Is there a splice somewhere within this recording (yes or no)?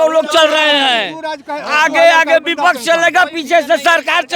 no